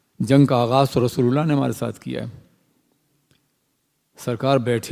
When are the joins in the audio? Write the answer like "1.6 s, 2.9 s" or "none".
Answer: none